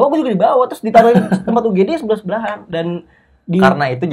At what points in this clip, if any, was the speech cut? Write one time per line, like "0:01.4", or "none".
none